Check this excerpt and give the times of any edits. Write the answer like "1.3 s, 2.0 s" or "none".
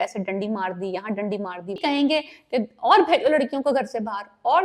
1.8 s